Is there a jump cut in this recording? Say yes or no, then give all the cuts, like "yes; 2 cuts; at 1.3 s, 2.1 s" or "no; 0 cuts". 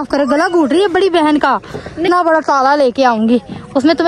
yes; 1 cut; at 2.1 s